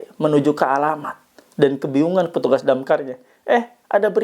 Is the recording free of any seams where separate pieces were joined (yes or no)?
yes